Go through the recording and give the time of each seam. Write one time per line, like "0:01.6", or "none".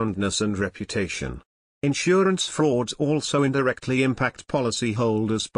none